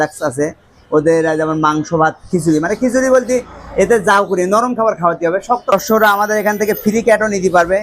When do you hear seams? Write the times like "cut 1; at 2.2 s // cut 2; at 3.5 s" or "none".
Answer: cut 1; at 5.7 s